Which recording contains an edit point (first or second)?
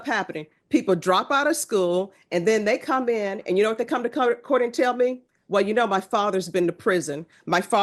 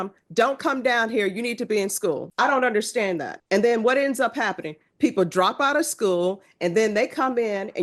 second